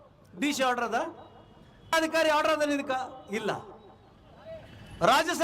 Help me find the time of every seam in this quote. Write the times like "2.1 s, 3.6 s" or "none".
1.9 s

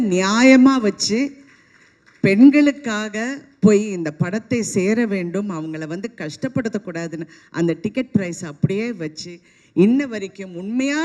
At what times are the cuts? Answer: none

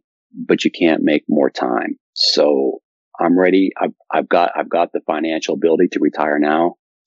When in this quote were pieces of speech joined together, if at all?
2.9 s

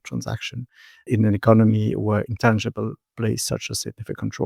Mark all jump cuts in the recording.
none

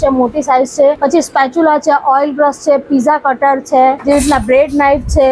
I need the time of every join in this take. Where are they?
1.0 s, 4.0 s

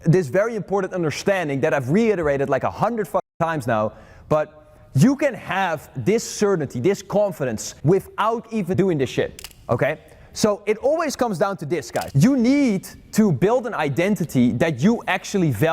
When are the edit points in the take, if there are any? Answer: 7.7 s, 8.7 s, 9.5 s, 12.0 s

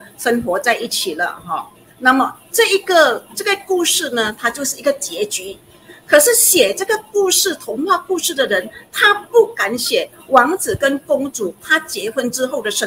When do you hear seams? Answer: none

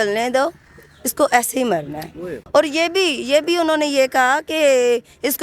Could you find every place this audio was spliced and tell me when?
2.4 s

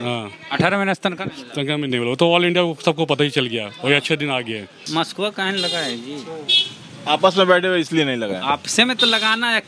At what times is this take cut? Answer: 4.8 s

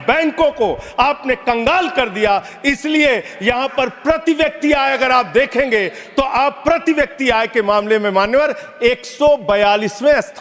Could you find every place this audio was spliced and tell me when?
none

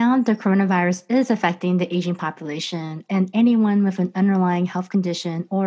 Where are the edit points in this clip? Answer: none

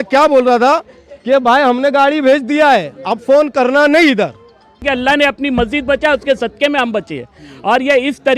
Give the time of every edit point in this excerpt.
4.8 s

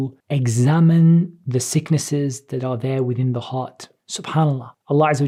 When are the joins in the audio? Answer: none

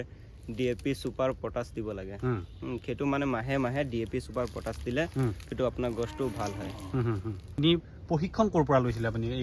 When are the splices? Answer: none

